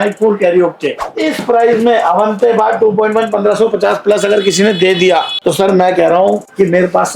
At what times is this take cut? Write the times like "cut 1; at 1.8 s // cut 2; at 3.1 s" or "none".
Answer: cut 1; at 1.0 s // cut 2; at 5.3 s